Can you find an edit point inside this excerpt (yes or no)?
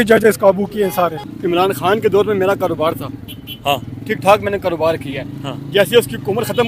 yes